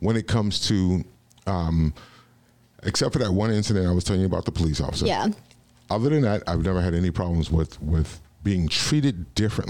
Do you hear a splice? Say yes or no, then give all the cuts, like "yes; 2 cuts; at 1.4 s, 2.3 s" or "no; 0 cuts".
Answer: no; 0 cuts